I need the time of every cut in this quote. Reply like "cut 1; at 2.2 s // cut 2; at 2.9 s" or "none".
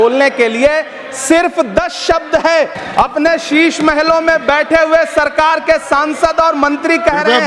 cut 1; at 2.8 s